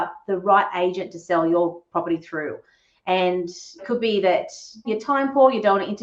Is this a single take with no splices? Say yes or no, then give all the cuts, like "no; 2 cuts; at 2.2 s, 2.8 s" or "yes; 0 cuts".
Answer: no; 2 cuts; at 3.8 s, 4.9 s